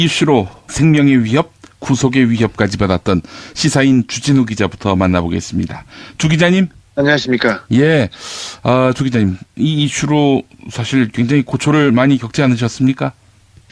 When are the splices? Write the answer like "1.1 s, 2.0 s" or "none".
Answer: none